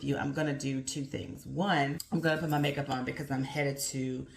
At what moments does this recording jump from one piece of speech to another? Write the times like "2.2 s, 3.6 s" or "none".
2.0 s